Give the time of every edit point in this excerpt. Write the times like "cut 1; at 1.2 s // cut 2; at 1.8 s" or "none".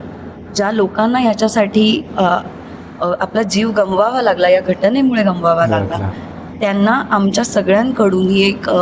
none